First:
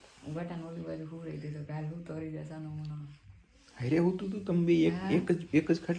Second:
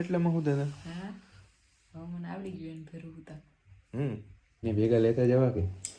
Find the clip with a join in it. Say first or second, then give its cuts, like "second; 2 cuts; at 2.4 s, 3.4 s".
second; 1 cut; at 4.6 s